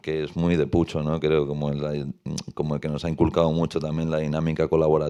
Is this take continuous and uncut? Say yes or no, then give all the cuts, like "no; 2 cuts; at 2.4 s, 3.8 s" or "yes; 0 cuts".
yes; 0 cuts